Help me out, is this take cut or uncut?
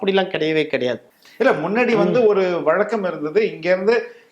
cut